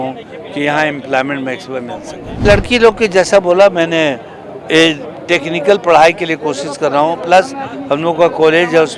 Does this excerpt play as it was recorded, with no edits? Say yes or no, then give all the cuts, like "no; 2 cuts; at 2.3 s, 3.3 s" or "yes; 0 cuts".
no; 1 cut; at 2.4 s